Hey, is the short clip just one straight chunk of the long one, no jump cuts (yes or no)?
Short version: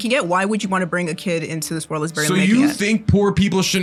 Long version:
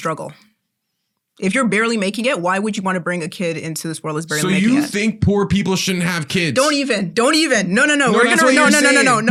yes